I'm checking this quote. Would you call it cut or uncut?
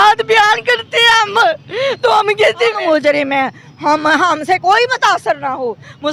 cut